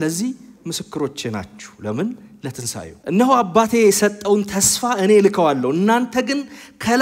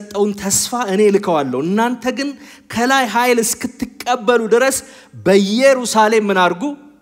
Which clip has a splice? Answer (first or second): first